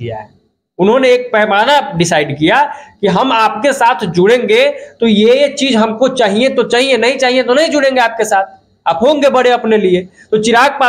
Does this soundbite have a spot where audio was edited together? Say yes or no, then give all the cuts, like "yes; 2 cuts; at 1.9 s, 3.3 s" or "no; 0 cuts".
no; 0 cuts